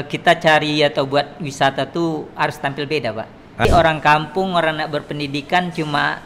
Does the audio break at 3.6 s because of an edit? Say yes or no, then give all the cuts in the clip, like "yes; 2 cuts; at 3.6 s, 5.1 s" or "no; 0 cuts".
yes; 1 cut; at 3.6 s